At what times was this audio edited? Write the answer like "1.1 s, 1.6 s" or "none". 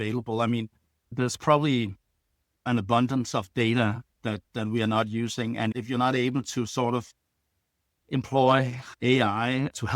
5.7 s